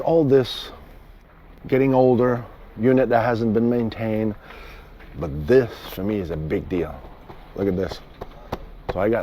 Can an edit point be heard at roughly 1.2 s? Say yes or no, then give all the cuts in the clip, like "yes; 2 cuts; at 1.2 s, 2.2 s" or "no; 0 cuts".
yes; 1 cut; at 1.2 s